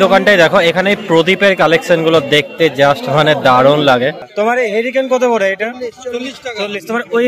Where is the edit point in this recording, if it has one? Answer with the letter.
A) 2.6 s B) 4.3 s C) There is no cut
B